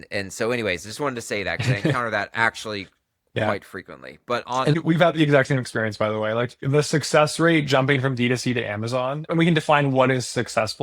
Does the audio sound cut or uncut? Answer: cut